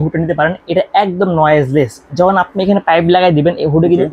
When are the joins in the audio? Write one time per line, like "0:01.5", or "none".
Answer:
none